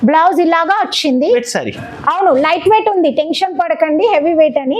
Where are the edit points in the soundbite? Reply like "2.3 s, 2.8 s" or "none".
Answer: 1.5 s